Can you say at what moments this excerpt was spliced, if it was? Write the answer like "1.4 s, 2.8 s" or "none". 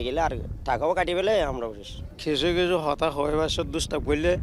none